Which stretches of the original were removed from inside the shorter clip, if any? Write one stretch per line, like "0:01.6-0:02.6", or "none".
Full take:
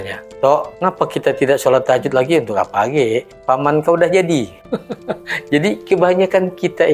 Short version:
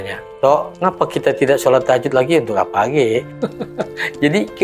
0:03.3-0:04.6